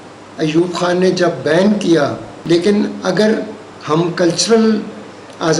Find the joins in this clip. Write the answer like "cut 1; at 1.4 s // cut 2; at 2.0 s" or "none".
cut 1; at 2.3 s